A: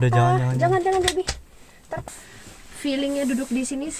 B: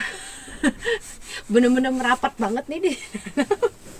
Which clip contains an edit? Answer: A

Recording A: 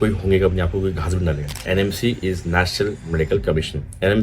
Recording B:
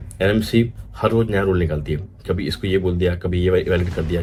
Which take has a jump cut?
A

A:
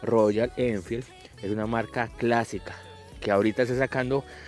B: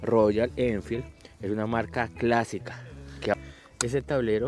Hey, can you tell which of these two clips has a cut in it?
B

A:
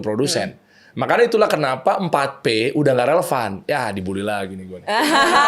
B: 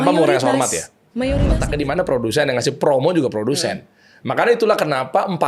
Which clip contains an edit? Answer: B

